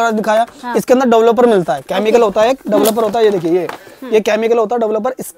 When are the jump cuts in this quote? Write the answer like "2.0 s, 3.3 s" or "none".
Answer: none